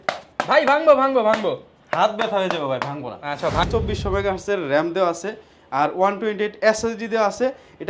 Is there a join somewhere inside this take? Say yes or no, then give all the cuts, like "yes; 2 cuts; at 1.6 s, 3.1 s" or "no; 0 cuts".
yes; 1 cut; at 3.7 s